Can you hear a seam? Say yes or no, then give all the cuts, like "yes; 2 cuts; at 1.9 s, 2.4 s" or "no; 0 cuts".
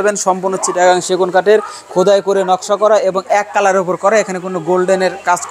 no; 0 cuts